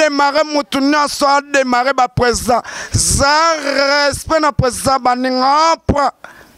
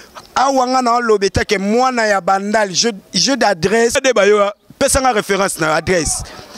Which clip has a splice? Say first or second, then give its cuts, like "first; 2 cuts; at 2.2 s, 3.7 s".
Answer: second; 1 cut; at 4.0 s